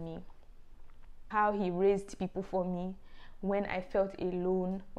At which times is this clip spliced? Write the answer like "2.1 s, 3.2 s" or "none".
1.2 s